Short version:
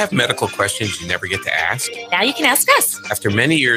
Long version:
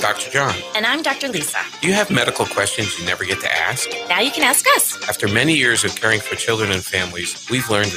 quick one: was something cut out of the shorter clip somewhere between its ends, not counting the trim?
no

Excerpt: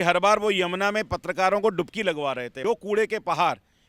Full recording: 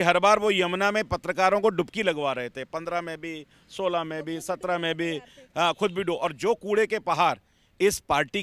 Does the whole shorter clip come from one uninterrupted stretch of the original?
no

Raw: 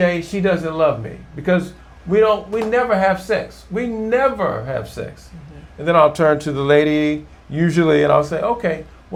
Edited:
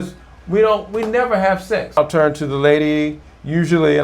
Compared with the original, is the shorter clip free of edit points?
no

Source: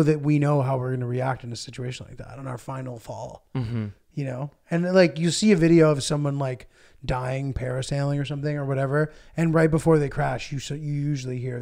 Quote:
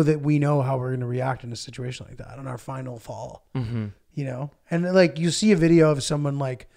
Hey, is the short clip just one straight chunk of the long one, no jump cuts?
yes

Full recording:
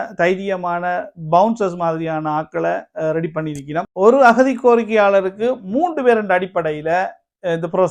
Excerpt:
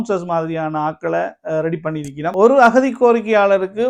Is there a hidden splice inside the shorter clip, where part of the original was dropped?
yes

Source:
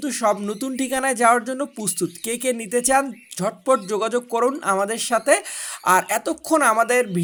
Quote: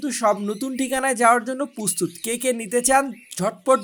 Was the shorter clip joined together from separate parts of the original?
no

